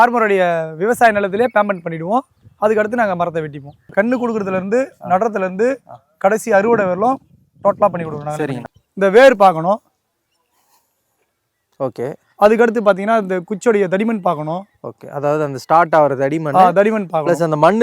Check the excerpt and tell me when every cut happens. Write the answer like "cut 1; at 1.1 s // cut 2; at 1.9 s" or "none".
cut 1; at 3.9 s // cut 2; at 8.7 s